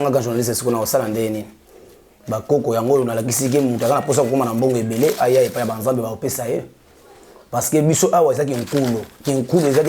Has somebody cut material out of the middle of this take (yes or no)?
no